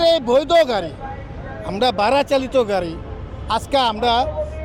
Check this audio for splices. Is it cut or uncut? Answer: uncut